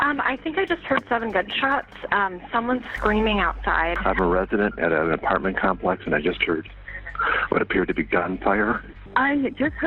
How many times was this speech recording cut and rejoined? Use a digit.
1